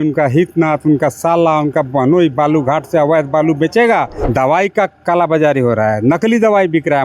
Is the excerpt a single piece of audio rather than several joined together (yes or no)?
no